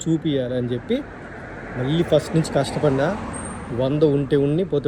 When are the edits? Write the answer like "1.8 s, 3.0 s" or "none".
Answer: none